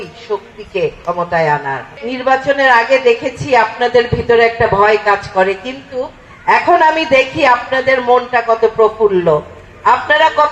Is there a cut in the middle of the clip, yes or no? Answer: yes